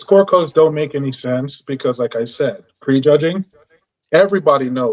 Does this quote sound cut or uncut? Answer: uncut